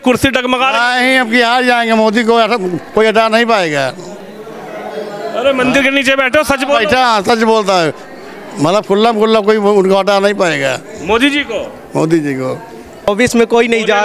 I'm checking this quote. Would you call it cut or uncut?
cut